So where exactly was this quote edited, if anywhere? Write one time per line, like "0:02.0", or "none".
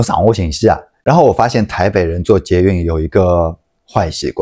0:00.9

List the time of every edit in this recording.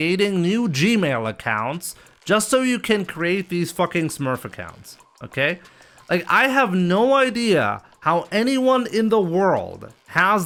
none

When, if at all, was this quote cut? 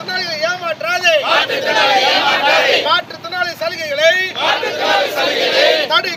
none

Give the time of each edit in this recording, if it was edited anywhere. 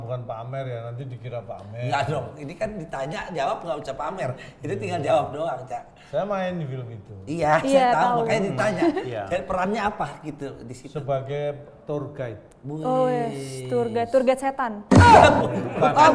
none

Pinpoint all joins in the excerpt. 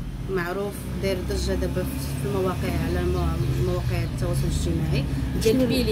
none

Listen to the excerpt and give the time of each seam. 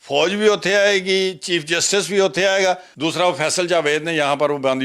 0:02.9

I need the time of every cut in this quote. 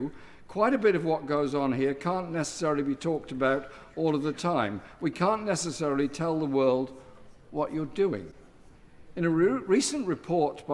none

